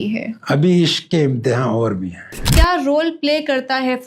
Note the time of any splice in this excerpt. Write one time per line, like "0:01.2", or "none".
0:02.4